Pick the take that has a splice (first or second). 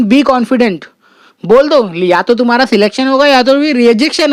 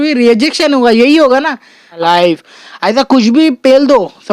second